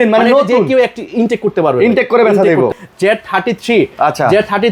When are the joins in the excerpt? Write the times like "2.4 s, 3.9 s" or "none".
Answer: 2.7 s